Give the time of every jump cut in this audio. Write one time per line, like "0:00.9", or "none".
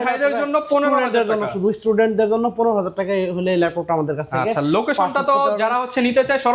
none